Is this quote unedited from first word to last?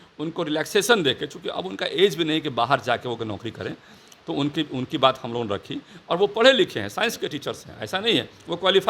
yes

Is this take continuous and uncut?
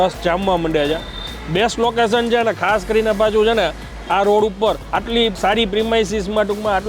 no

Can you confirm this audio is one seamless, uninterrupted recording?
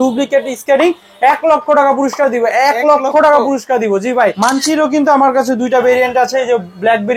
no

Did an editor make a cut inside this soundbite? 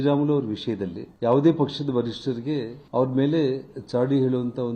yes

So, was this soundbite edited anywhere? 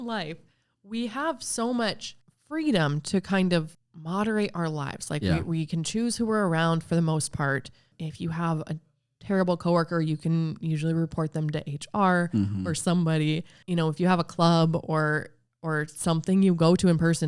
yes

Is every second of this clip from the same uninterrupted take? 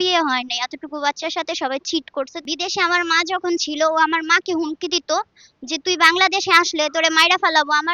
no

